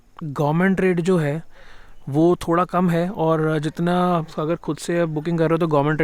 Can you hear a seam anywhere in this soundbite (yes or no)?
no